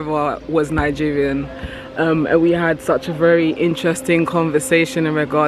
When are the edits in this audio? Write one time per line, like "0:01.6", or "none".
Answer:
none